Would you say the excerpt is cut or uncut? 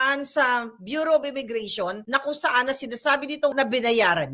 uncut